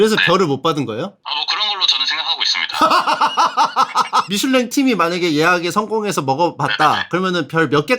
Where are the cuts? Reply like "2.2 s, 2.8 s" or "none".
4.3 s

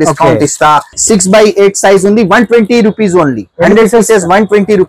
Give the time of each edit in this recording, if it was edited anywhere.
1.0 s

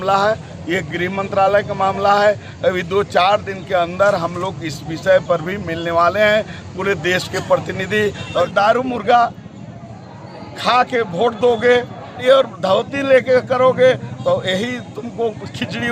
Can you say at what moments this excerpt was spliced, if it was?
8.5 s, 12.2 s

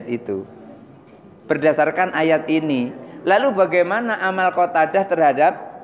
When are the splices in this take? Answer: none

